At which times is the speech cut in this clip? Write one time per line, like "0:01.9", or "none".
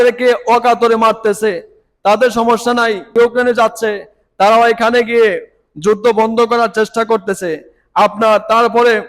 0:03.1